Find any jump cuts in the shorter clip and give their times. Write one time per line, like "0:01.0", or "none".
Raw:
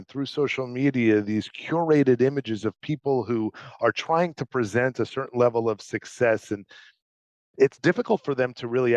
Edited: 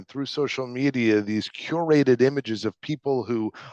none